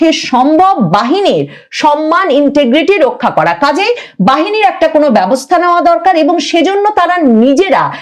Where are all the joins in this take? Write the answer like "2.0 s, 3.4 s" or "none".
none